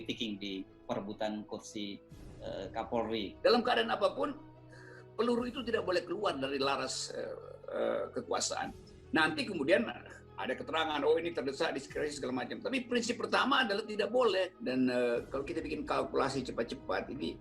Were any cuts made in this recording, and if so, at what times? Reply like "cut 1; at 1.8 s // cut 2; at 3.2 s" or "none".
cut 1; at 3.3 s // cut 2; at 14.6 s